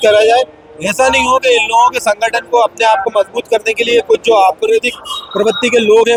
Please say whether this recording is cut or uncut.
uncut